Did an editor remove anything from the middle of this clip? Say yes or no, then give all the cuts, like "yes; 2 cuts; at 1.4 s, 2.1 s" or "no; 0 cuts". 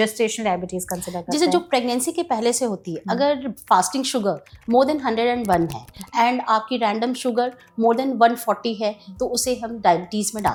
no; 0 cuts